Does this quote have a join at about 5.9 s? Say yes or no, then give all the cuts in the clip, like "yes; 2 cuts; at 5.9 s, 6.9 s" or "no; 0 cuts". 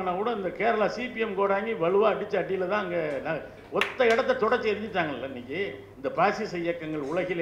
yes; 1 cut; at 5.9 s